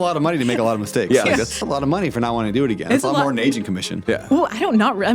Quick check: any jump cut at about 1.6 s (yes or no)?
yes